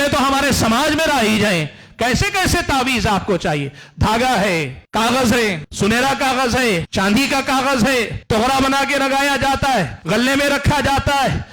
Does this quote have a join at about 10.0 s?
yes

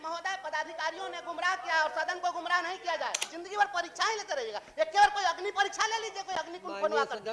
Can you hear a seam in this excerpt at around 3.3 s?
yes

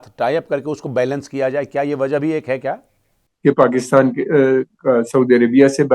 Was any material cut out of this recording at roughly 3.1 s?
yes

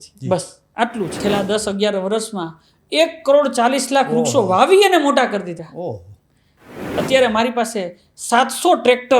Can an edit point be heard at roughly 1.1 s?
yes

